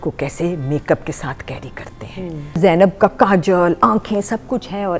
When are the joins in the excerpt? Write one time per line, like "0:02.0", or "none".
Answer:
0:02.8